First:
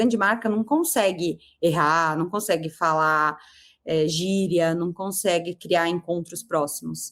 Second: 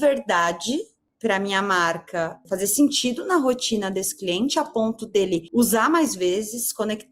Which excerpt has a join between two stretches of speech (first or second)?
second